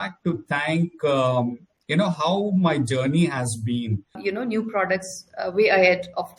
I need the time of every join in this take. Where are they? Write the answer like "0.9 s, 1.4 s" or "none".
4.2 s